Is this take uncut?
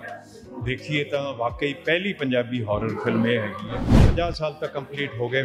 no; 1 cut; at 4.0 s

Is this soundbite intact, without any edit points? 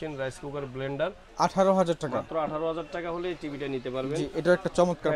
no; 1 cut; at 1.2 s

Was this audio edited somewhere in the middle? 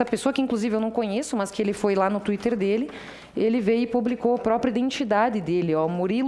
no; 0 cuts

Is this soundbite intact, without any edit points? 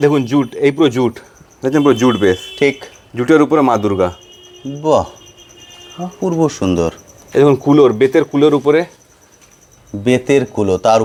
yes; 0 cuts

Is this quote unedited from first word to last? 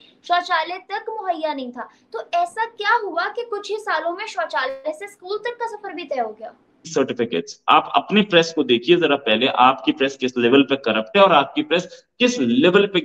no; 1 cut; at 6.9 s

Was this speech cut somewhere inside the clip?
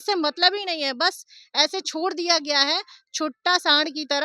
no; 0 cuts

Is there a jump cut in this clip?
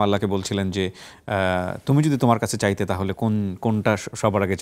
no; 0 cuts

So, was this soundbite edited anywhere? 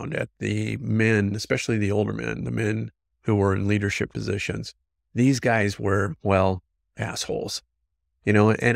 no; 0 cuts

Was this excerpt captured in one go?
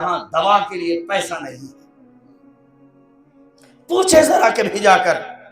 no; 2 cuts; at 1.7 s, 3.8 s

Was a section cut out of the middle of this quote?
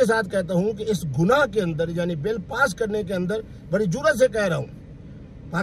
no; 0 cuts

